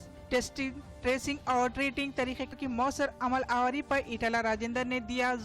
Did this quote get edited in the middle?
yes; 1 cut; at 2.5 s

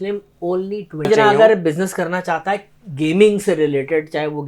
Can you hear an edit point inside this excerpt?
yes; 1 cut; at 1.1 s

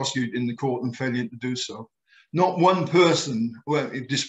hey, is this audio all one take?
yes; 0 cuts

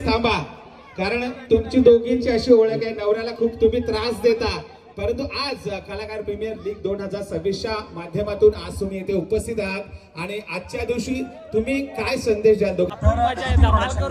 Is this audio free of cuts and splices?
no; 1 cut; at 12.9 s

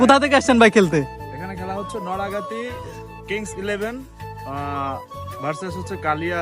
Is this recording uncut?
yes; 0 cuts

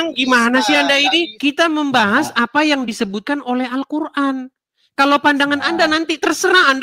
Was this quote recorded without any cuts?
no; 1 cut; at 1.3 s

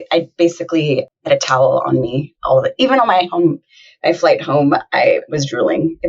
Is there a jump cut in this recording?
yes; 1 cut; at 1.3 s

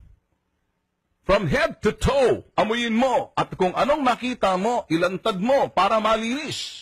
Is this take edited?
no; 0 cuts

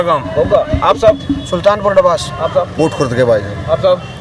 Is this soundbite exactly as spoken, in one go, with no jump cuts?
yes; 0 cuts

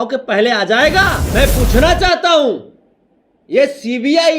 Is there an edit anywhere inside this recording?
yes; 1 cut; at 1.2 s

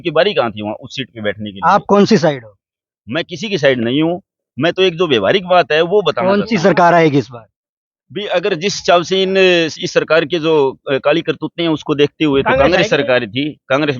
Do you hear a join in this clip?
no; 0 cuts

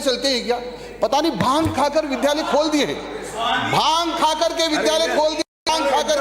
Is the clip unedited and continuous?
yes; 0 cuts

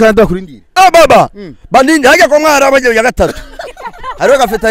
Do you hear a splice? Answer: no; 0 cuts

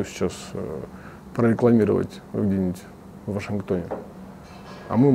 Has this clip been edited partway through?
no; 0 cuts

